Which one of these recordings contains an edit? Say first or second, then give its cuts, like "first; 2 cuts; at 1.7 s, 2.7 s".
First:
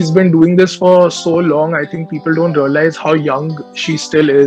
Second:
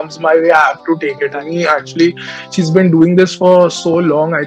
second; 1 cut; at 1.3 s